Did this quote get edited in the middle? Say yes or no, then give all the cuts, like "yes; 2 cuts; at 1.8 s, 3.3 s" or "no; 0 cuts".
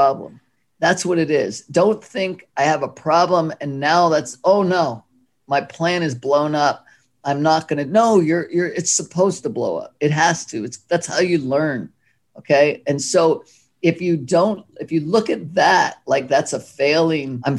no; 0 cuts